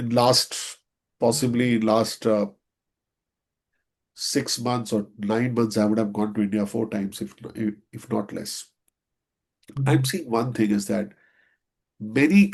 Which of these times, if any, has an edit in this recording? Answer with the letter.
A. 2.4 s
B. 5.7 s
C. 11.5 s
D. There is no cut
D